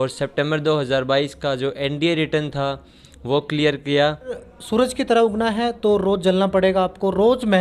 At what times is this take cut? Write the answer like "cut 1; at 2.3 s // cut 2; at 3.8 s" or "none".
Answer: cut 1; at 4.5 s